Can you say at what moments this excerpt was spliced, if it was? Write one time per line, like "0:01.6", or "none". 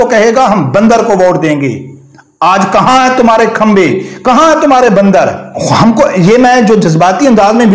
none